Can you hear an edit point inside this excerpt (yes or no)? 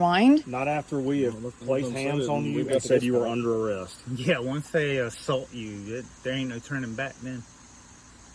no